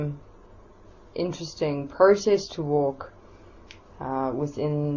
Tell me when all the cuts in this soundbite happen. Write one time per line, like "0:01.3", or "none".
none